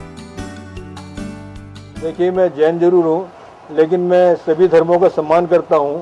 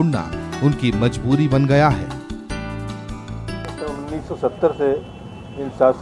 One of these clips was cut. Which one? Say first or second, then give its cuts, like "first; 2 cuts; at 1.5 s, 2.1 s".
first; 1 cut; at 4.4 s